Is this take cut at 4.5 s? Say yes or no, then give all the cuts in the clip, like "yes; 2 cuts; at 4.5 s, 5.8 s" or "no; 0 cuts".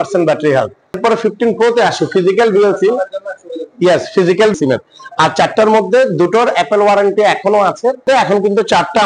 yes; 3 cuts; at 1.0 s, 4.5 s, 8.0 s